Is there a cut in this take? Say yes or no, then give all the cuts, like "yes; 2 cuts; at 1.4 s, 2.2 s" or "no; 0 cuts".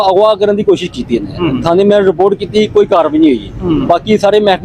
no; 0 cuts